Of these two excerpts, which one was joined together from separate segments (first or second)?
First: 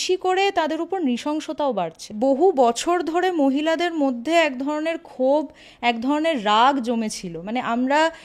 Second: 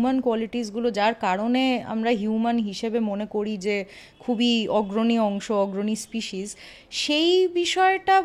first